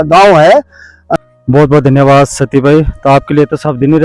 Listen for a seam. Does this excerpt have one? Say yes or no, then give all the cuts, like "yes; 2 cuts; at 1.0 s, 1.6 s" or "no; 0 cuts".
yes; 1 cut; at 0.9 s